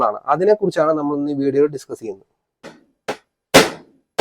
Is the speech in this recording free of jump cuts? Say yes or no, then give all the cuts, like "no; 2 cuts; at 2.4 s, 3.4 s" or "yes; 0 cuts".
no; 1 cut; at 2.8 s